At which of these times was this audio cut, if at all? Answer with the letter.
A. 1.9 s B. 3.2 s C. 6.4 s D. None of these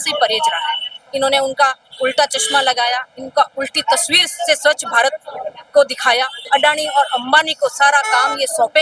C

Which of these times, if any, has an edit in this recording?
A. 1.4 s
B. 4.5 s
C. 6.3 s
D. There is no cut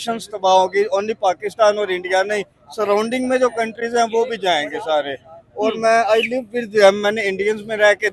D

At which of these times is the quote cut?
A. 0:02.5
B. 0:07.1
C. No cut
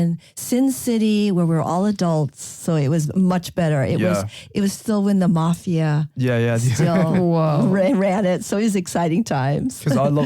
C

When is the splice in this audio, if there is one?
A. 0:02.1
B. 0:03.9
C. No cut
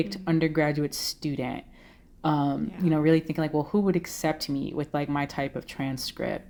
C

